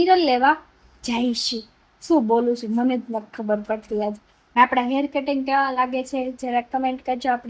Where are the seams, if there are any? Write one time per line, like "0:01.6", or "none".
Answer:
0:04.4